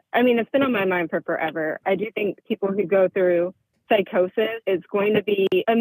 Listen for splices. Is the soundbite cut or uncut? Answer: cut